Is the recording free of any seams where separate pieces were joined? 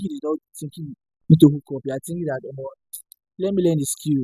yes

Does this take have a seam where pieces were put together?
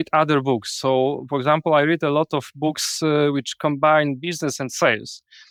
no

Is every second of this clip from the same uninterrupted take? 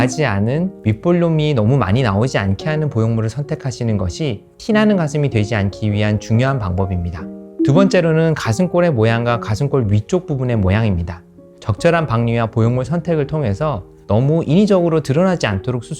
no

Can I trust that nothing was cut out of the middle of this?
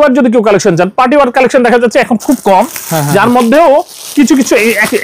yes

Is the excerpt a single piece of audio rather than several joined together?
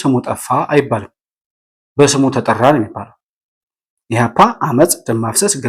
yes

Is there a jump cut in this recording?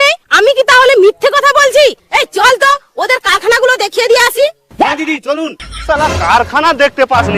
yes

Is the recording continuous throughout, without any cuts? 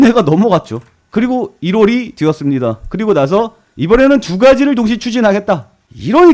yes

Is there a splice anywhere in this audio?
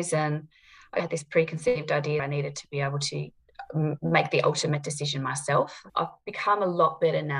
yes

